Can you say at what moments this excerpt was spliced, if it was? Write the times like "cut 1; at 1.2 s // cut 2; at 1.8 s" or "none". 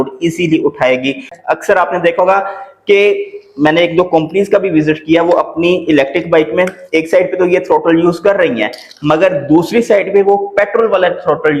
cut 1; at 1.3 s